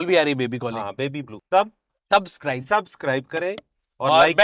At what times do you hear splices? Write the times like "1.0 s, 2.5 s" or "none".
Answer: 1.3 s